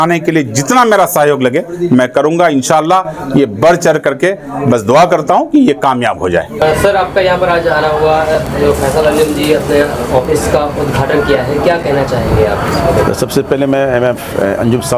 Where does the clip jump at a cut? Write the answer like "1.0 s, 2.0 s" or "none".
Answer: none